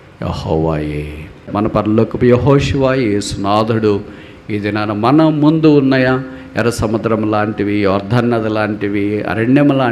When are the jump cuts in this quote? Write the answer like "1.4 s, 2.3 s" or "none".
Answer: 1.5 s